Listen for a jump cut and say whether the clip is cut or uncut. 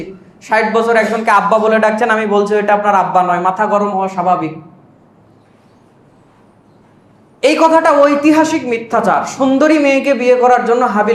uncut